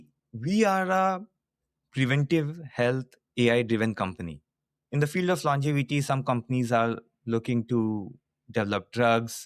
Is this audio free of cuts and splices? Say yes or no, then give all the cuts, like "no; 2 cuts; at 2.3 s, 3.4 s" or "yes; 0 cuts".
no; 1 cut; at 4.8 s